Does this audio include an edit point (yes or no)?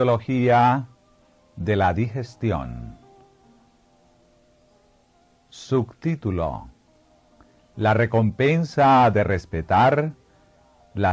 no